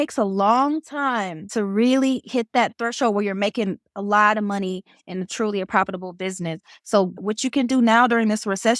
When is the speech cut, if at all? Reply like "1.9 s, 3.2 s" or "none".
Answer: 1.4 s